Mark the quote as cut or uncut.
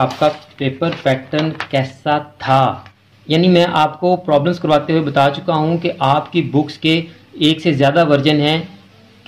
cut